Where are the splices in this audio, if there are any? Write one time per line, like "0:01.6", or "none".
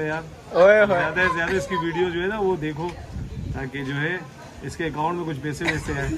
none